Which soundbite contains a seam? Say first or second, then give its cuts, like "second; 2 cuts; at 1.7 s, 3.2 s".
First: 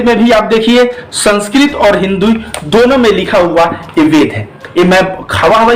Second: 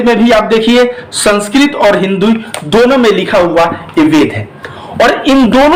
first; 1 cut; at 4.6 s